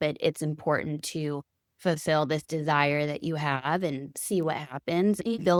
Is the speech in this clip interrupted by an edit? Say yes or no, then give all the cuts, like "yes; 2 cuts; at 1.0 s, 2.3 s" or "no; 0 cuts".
no; 0 cuts